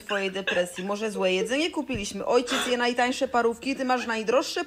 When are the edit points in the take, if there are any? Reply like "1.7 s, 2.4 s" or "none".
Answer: none

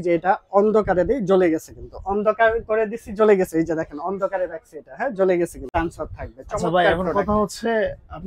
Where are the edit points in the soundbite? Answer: 5.7 s

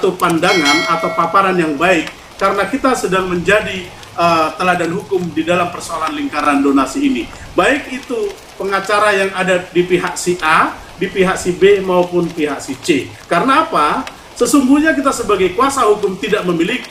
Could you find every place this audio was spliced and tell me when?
none

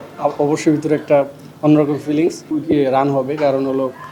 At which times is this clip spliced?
2.5 s

